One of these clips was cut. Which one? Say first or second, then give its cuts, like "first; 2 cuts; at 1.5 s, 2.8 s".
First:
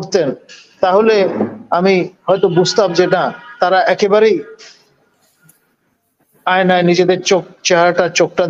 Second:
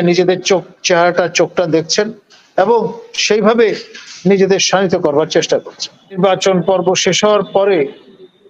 second; 1 cut; at 6.2 s